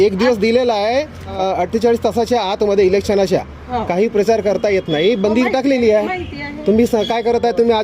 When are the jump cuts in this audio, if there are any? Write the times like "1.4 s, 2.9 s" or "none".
1.3 s